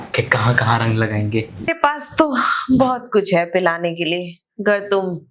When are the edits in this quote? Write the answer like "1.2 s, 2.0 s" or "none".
1.7 s